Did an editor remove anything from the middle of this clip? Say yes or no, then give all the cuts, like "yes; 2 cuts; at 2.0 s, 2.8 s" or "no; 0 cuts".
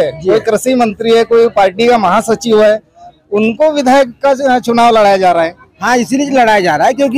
no; 0 cuts